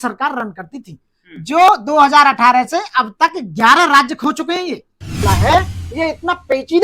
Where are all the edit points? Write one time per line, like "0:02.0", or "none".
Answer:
0:05.2